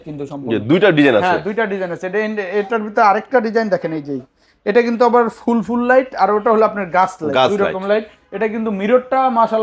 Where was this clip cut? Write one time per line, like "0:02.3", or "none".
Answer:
none